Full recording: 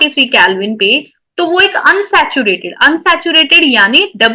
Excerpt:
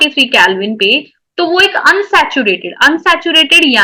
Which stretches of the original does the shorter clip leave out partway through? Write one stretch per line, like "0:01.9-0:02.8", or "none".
none